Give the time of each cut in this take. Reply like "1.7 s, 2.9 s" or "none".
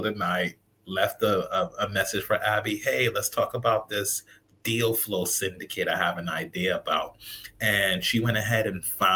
none